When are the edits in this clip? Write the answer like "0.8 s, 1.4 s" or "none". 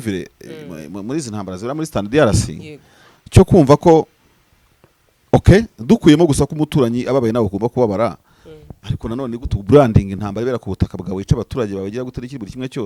none